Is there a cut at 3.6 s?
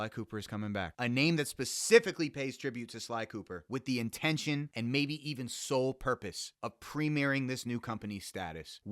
no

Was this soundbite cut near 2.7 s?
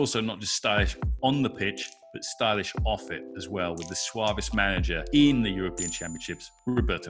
no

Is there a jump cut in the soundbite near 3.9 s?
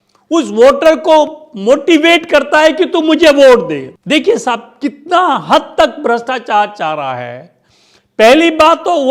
yes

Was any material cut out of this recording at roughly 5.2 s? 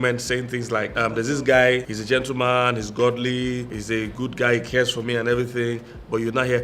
no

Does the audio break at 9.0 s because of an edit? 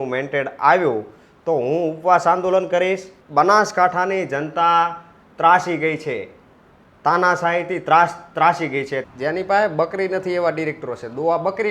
yes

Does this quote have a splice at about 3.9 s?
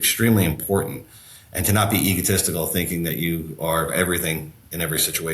yes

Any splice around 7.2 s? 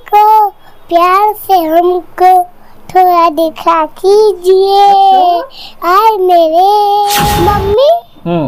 yes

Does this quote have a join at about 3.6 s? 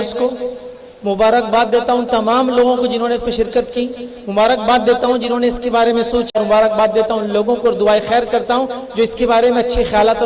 no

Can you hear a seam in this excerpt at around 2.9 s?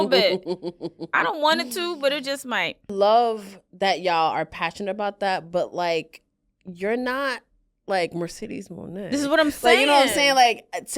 yes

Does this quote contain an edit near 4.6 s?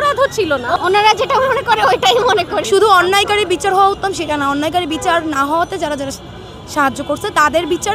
no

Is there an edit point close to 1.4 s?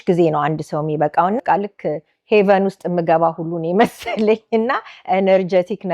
yes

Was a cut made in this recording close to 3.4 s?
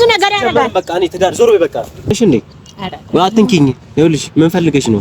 no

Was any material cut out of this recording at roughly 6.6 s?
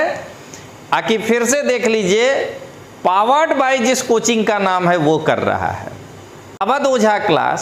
yes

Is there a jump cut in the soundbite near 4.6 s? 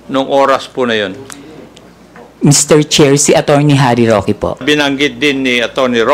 yes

